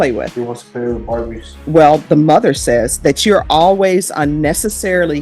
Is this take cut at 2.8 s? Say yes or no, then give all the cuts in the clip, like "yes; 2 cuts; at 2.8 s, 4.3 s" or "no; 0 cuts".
no; 1 cut; at 1.5 s